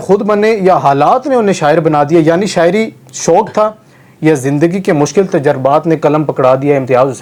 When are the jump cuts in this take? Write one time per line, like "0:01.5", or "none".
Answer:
none